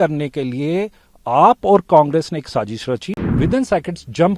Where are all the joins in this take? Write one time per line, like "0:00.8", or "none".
0:03.2

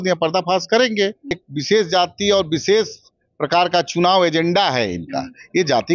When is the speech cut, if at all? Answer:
0:01.4

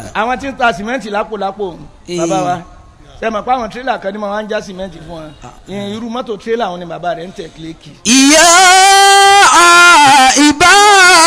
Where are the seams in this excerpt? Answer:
none

